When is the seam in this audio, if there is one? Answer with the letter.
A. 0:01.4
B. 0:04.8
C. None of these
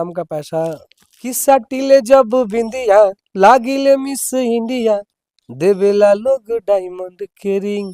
A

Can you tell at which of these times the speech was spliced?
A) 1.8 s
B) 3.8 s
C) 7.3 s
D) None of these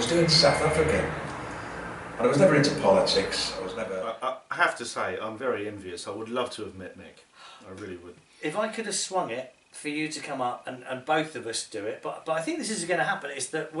B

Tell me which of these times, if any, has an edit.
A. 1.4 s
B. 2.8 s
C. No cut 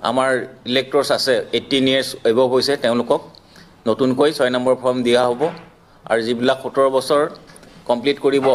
C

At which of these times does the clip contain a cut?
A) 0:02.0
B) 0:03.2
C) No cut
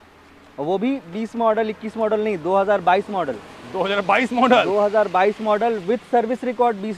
C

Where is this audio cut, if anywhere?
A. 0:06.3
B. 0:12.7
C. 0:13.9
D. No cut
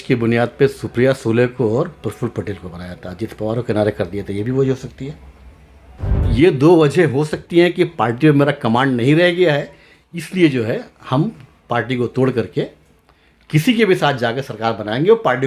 A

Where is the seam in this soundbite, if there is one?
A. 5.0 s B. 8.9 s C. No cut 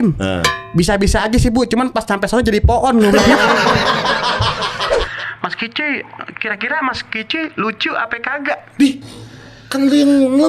A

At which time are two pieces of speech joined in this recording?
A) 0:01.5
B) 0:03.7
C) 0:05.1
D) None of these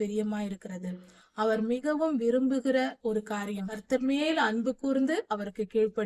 B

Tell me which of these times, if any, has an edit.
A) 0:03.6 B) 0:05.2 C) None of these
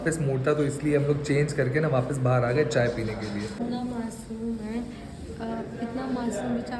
A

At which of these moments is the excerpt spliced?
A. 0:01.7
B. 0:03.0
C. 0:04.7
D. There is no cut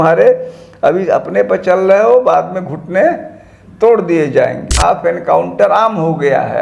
C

